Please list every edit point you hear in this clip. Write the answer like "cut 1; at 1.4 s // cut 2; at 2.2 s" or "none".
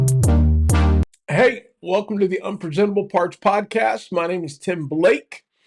cut 1; at 1.0 s